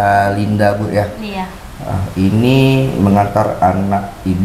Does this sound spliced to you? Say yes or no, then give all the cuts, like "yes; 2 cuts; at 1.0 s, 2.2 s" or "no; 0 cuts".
no; 0 cuts